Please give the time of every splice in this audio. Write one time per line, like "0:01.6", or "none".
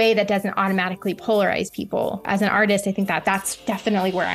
0:02.3
0:03.2